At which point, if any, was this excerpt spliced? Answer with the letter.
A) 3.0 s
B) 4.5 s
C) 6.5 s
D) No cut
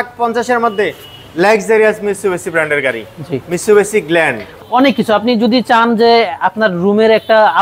B